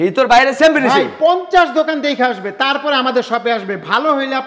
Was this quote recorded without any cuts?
yes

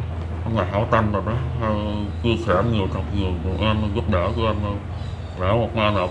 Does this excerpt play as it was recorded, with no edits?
yes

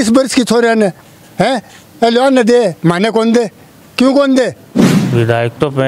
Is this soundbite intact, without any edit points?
no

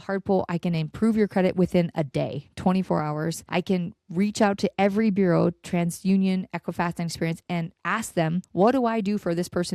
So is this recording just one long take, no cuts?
no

